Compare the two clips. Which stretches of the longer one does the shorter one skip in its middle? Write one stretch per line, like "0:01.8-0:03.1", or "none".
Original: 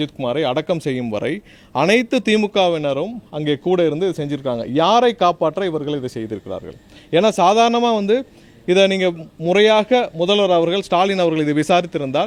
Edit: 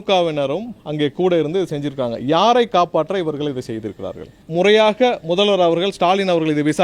0:06.8-0:09.3